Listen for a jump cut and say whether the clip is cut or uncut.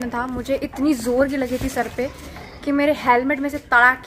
uncut